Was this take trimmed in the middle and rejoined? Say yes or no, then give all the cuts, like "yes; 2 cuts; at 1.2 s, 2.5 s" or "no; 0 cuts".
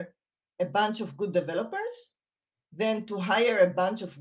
no; 0 cuts